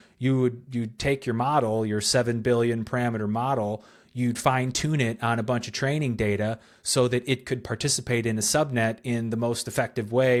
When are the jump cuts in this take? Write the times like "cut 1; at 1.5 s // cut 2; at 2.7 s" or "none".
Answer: none